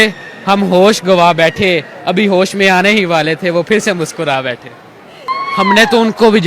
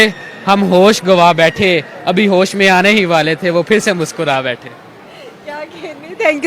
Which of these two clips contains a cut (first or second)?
first